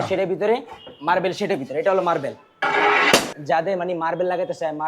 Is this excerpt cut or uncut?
cut